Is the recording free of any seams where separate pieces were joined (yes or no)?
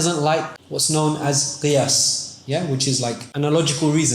no